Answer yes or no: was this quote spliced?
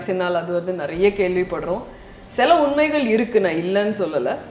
no